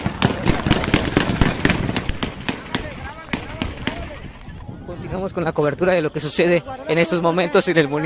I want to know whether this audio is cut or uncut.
cut